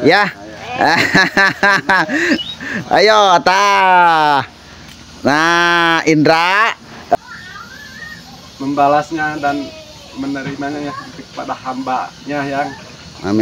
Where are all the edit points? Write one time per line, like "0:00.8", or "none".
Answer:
0:07.2